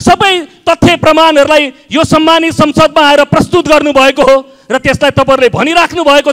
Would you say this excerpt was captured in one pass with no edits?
yes; 0 cuts

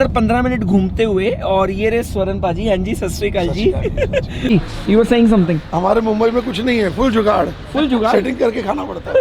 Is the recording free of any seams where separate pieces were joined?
no; 1 cut; at 4.4 s

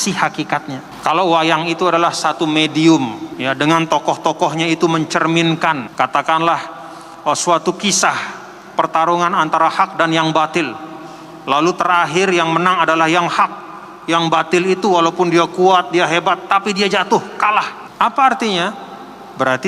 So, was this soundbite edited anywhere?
yes; 4 cuts; at 0.9 s, 3.3 s, 5.9 s, 17.8 s

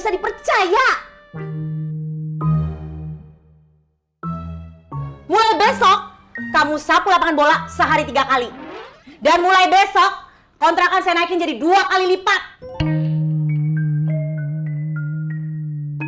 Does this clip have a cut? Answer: no; 0 cuts

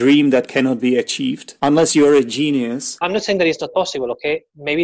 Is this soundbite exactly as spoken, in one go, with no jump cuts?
no; 2 cuts; at 1.4 s, 3.0 s

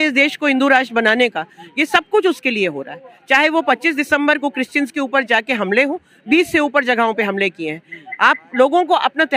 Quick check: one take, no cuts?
yes; 0 cuts

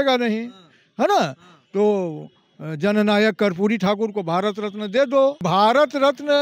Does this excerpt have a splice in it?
yes; 1 cut; at 5.4 s

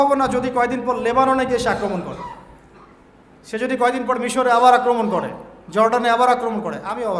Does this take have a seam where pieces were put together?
no; 0 cuts

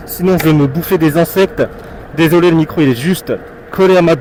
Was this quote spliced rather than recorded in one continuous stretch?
no; 0 cuts

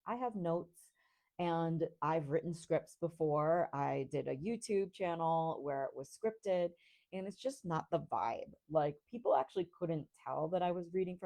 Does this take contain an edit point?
no; 0 cuts

